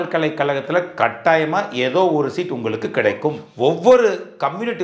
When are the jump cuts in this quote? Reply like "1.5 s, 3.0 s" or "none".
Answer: 3.5 s